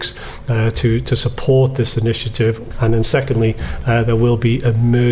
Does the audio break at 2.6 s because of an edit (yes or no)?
yes